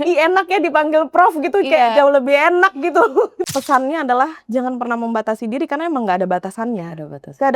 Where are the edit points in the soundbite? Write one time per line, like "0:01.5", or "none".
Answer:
0:03.4